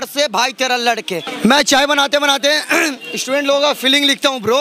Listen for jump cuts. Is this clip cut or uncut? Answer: cut